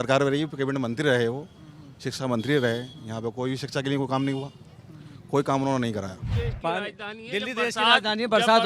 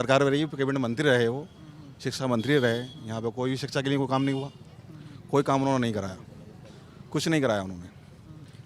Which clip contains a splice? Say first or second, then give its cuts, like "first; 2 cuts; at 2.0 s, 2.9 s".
first; 1 cut; at 6.2 s